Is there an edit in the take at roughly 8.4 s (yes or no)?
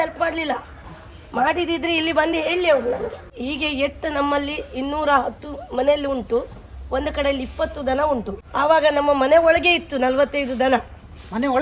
yes